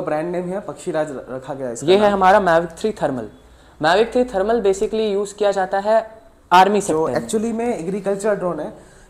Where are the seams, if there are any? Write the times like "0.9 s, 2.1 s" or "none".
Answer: 1.8 s, 6.9 s

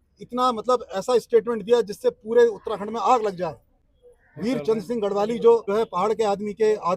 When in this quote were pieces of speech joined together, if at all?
5.7 s

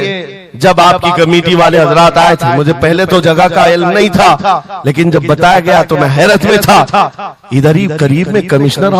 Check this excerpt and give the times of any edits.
none

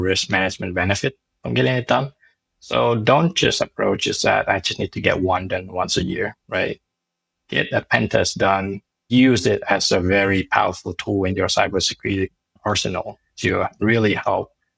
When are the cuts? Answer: 12.6 s

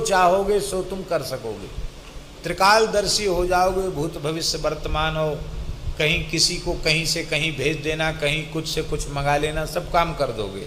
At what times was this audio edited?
none

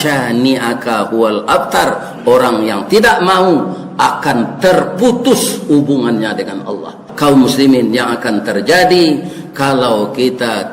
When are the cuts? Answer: 7.0 s

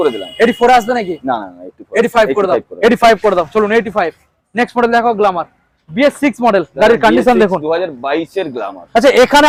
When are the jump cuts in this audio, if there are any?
none

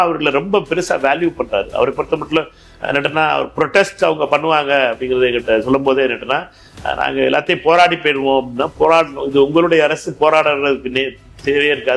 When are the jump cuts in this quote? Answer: none

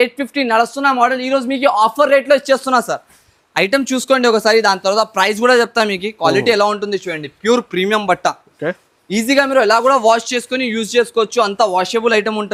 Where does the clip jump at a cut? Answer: none

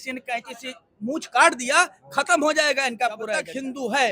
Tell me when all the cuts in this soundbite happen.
3.2 s

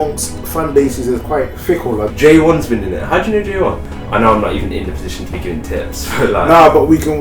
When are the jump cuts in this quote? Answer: 2.1 s, 3.9 s

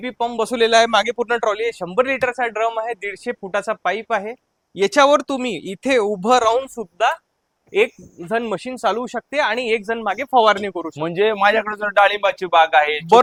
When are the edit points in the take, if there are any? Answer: none

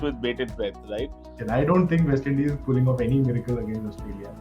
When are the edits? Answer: 1.2 s

